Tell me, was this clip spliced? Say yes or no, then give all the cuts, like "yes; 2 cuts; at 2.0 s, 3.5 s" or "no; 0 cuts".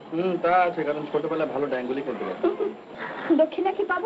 yes; 1 cut; at 2.9 s